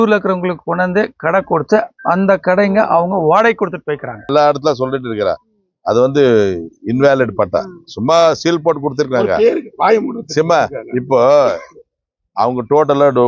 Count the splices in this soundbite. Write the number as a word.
one